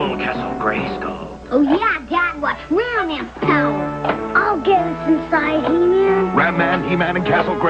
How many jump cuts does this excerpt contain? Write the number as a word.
one